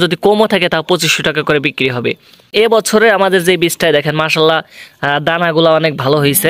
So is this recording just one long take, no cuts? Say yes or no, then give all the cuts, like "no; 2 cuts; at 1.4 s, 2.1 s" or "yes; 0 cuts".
no; 1 cut; at 2.5 s